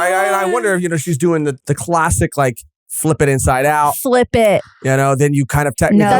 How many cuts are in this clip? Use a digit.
1